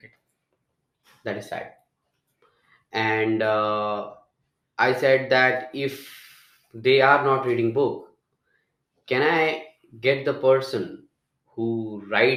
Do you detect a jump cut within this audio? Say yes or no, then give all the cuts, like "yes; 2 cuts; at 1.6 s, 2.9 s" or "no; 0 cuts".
no; 0 cuts